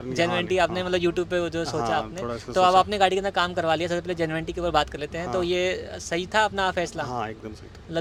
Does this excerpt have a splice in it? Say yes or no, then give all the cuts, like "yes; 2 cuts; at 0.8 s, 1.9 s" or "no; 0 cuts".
no; 0 cuts